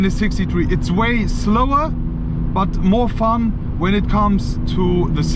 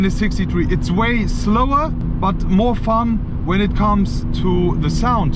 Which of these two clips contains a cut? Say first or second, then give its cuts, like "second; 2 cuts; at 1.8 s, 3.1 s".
second; 1 cut; at 2.0 s